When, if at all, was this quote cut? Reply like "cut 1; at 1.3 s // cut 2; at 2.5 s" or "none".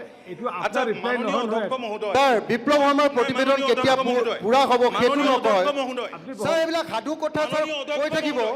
none